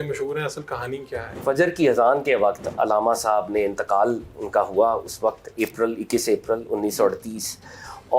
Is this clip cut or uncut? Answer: cut